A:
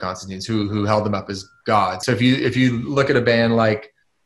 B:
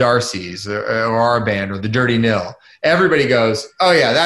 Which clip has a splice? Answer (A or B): A